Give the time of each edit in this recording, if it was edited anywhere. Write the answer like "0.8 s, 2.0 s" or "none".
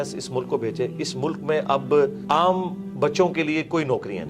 2.2 s